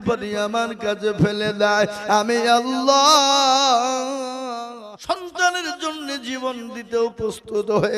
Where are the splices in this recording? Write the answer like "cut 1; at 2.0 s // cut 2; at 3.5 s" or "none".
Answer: cut 1; at 4.4 s